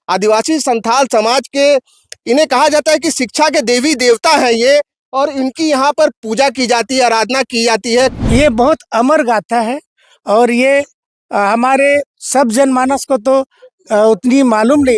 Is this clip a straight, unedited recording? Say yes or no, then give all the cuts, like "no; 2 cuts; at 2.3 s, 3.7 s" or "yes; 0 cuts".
no; 1 cut; at 8.2 s